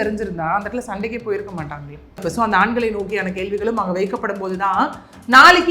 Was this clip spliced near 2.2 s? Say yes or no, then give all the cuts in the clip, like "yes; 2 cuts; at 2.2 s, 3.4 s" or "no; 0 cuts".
yes; 1 cut; at 2.2 s